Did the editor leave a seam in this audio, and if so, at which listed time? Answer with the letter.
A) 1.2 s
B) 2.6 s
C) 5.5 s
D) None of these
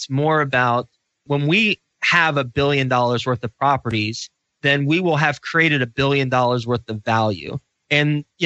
A